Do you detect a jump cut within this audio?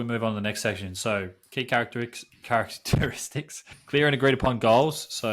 yes; 1 cut; at 3.7 s

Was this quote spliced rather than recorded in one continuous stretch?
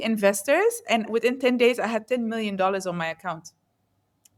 no; 0 cuts

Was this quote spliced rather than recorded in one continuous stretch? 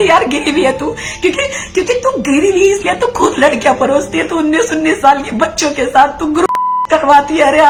no; 0 cuts

